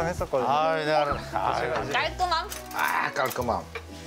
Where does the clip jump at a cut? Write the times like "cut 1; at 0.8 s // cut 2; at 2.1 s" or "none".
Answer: cut 1; at 1.8 s

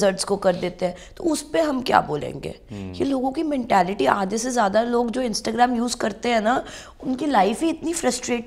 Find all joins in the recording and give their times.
none

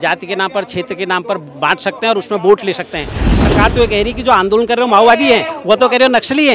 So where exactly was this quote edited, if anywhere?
cut 1; at 3.4 s

